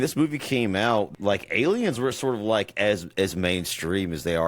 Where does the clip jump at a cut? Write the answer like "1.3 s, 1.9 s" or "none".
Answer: 1.1 s

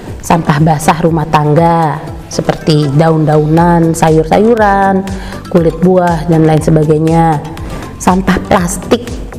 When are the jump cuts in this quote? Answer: none

